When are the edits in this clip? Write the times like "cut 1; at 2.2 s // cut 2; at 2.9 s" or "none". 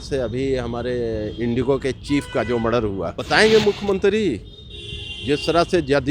cut 1; at 3.1 s